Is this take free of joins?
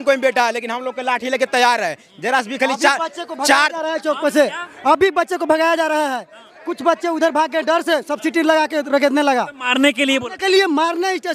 yes; 0 cuts

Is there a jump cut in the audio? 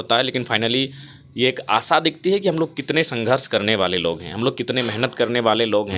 no; 0 cuts

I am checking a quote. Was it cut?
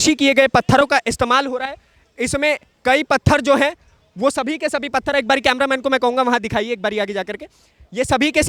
no; 0 cuts

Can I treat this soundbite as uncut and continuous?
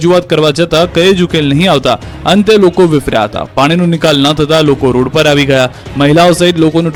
yes; 0 cuts

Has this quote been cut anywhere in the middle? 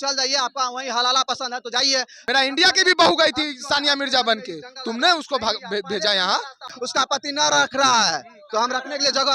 yes; 2 cuts; at 2.1 s, 6.7 s

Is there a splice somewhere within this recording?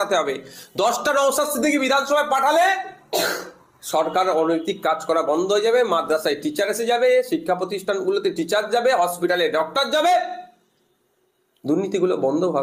no; 0 cuts

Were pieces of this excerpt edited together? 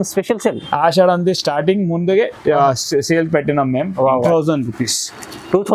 yes; 1 cut; at 4.3 s

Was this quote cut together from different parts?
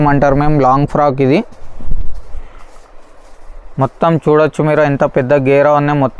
no; 0 cuts

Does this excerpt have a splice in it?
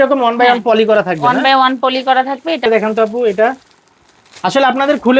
no; 0 cuts

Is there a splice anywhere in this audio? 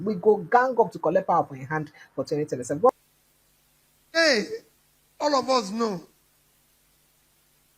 yes; 1 cut; at 2.9 s

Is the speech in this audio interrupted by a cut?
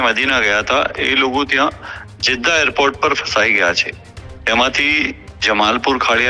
no; 0 cuts

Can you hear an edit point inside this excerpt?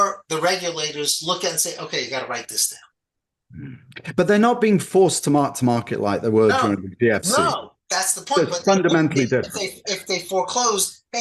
no; 0 cuts

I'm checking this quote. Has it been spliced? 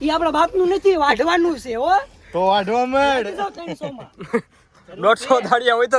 no; 0 cuts

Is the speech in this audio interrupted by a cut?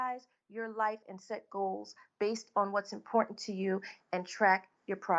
yes; 1 cut; at 3.9 s

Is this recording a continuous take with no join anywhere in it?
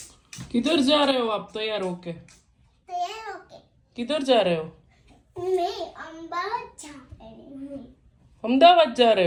yes; 0 cuts

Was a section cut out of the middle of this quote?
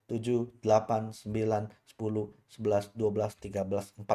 no; 0 cuts

